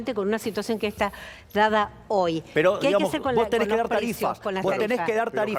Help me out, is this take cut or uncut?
uncut